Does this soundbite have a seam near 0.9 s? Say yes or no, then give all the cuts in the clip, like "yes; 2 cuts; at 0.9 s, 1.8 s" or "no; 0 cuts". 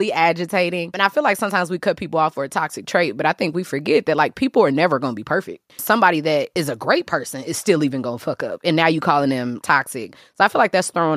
yes; 4 cuts; at 0.9 s, 5.7 s, 6.5 s, 9.6 s